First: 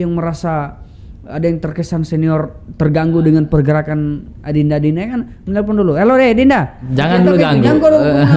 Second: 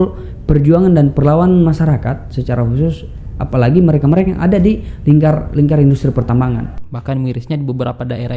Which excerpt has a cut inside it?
second; 1 cut; at 6.8 s

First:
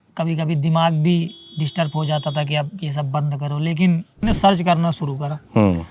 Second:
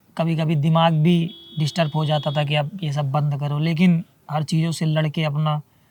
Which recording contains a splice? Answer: first; 1 cut; at 4.2 s

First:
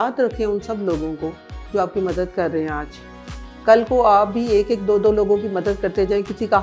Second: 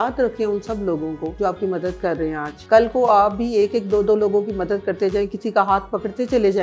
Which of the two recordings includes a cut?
second; 2 cuts; at 1.3 s, 2.5 s

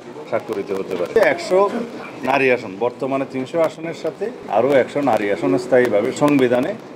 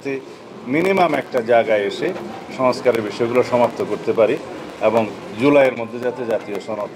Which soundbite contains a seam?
first; 3 cuts; at 1.2 s, 4.4 s, 6.2 s

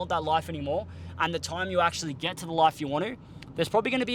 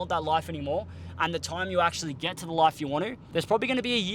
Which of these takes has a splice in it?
second; 1 cut; at 3.2 s

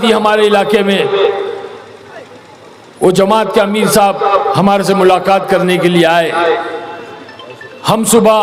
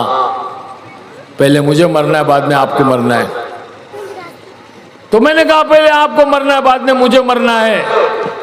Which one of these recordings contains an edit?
second; 1 cut; at 3.9 s

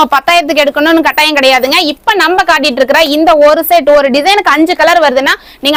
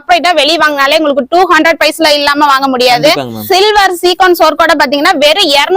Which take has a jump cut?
second; 1 cut; at 3.4 s

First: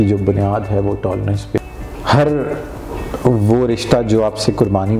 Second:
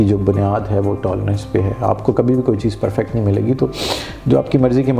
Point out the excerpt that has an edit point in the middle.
first; 1 cut; at 1.6 s

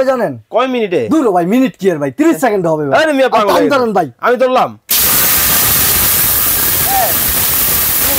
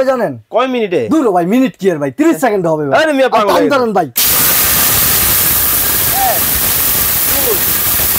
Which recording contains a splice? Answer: second; 1 cut; at 4.1 s

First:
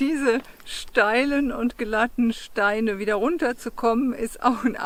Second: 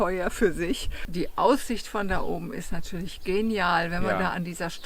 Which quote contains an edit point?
second; 1 cut; at 1.0 s

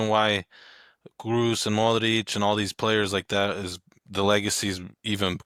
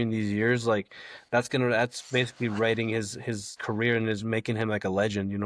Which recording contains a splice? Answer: second; 1 cut; at 3.6 s

